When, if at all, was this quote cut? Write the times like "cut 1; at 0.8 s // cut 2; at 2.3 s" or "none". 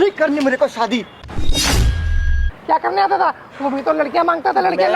cut 1; at 2.5 s